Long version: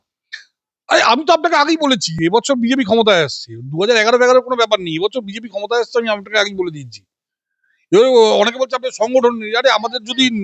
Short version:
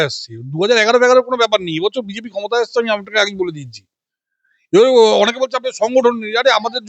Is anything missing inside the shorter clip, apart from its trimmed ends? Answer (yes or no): no